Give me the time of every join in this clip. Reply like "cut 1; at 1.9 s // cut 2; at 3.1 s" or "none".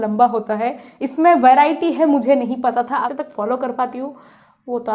cut 1; at 3.1 s